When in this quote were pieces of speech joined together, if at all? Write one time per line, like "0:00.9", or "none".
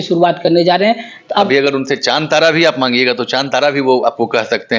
0:01.5